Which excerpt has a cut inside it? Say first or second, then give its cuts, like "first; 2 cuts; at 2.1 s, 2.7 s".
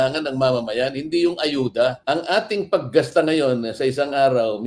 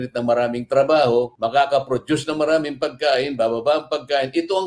first; 1 cut; at 2.0 s